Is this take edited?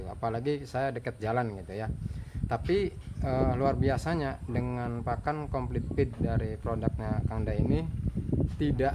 no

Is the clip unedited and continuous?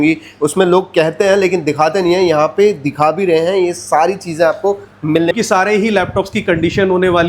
no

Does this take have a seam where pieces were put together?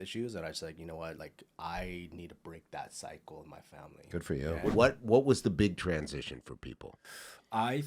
yes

